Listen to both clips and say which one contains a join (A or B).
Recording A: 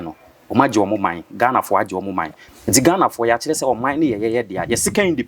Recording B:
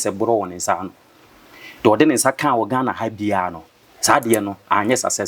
A